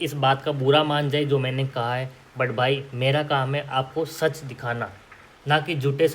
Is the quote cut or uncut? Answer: uncut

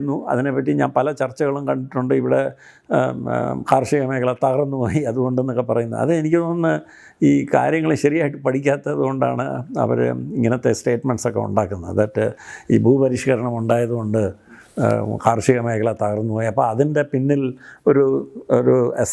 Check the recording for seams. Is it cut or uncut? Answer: uncut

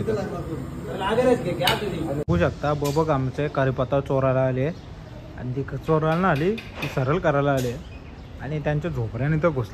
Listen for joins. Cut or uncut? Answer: cut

